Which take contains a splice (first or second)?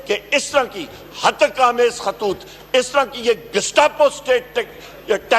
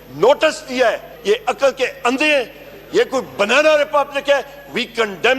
second